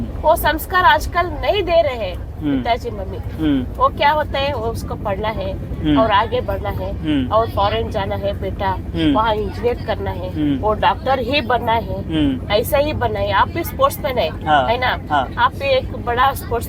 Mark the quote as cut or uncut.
uncut